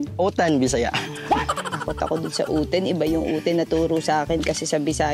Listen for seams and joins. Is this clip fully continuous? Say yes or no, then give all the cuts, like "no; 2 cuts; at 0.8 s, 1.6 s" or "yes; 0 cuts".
no; 1 cut; at 1.6 s